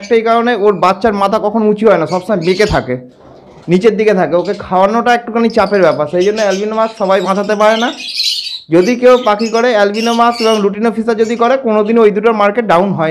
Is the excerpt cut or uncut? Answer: uncut